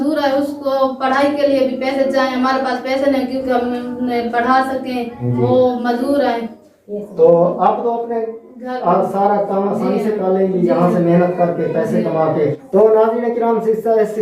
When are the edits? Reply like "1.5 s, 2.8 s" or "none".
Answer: 12.6 s